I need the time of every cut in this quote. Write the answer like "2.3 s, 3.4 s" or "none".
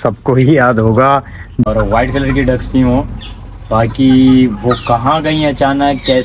1.7 s